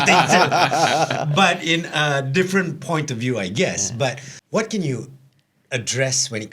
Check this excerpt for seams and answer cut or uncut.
cut